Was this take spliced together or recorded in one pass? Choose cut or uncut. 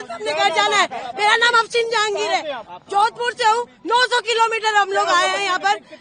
uncut